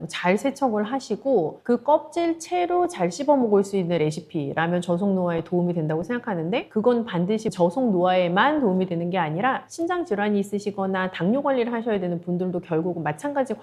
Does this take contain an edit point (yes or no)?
no